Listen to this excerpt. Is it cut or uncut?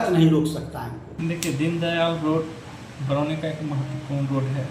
cut